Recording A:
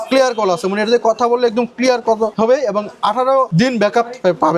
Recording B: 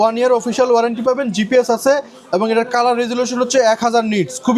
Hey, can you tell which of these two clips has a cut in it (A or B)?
A